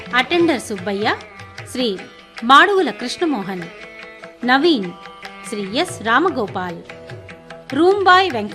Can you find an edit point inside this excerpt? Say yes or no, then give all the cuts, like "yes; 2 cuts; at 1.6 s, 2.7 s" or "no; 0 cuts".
no; 0 cuts